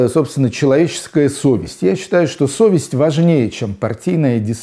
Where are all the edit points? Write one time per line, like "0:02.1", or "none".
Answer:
none